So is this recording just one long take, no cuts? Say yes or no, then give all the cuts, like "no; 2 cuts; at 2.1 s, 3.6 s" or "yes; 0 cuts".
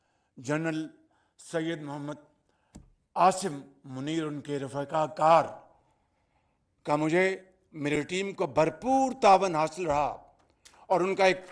yes; 0 cuts